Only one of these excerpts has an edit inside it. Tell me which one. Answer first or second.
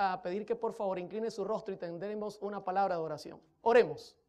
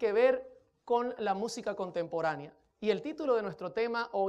second